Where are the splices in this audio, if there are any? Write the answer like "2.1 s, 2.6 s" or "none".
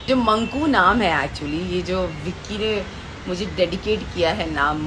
none